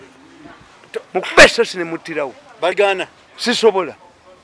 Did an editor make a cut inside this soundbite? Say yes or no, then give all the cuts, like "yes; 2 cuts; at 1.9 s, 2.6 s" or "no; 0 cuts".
yes; 1 cut; at 2.7 s